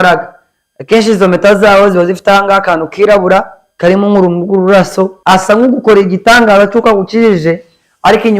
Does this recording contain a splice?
yes; 2 cuts; at 3.6 s, 5.2 s

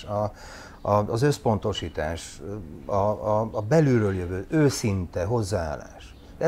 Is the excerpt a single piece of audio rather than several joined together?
yes; 0 cuts

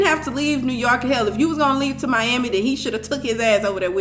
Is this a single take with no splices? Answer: yes; 0 cuts

